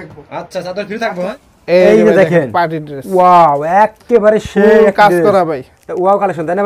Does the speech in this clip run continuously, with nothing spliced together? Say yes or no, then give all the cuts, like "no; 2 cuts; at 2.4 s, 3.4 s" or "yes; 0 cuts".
no; 1 cut; at 1.3 s